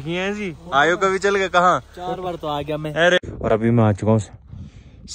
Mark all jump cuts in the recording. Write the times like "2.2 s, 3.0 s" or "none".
3.2 s